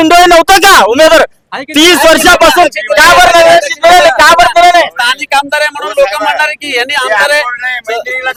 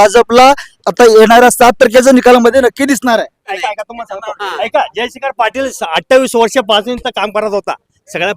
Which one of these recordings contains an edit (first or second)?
second